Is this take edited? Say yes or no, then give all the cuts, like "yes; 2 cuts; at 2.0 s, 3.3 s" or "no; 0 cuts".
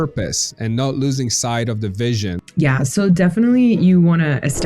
yes; 1 cut; at 2.4 s